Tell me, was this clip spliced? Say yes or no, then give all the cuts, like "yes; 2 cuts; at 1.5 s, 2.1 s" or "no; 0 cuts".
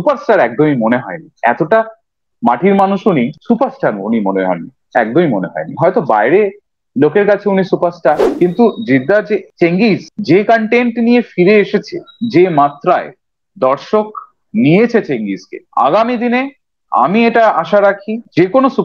yes; 1 cut; at 8.3 s